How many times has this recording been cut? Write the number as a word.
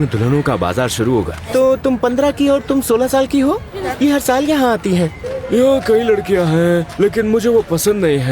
three